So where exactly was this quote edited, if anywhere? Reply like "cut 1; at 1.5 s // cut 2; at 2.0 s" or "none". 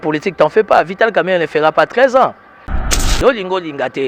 cut 1; at 2.8 s